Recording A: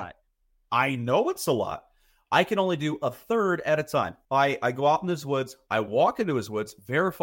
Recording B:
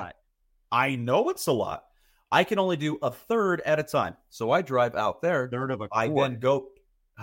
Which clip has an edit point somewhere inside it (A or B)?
A